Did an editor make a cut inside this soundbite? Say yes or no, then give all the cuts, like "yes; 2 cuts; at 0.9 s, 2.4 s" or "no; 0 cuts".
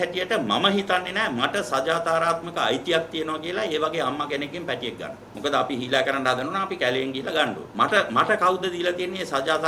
yes; 2 cuts; at 5.2 s, 7.6 s